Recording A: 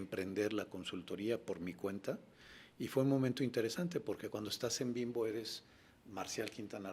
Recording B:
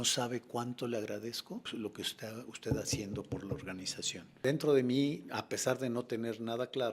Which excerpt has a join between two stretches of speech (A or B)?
B